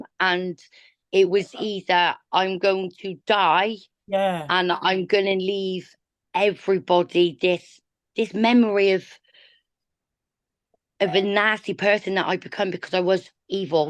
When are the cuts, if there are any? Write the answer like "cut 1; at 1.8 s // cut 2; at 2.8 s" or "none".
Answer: none